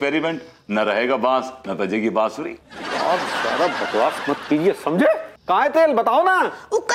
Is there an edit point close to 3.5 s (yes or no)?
no